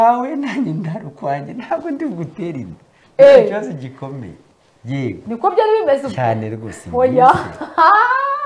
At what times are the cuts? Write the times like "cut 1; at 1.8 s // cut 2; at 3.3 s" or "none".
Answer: none